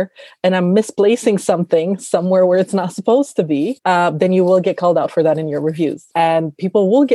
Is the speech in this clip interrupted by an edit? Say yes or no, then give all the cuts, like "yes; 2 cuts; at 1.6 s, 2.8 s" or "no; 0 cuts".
yes; 1 cut; at 6.1 s